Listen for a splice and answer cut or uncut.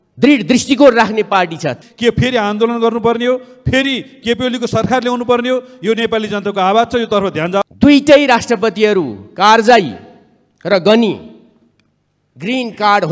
cut